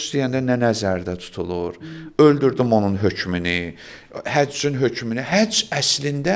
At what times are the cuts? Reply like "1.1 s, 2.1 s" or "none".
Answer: none